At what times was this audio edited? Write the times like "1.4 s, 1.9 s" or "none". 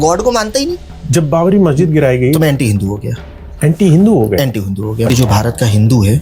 0.9 s, 5.1 s